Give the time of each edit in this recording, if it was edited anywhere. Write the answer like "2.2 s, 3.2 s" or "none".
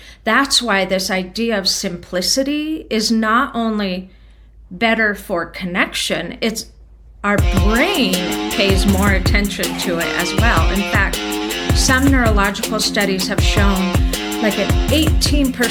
none